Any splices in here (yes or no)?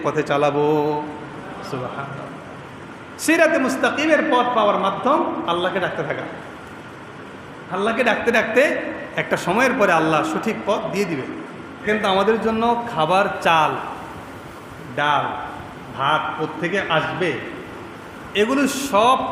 yes